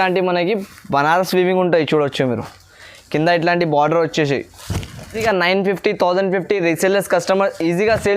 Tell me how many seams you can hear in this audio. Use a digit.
1